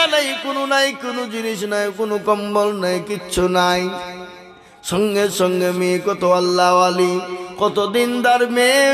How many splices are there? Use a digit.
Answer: 0